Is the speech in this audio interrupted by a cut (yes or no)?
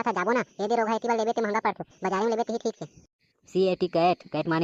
no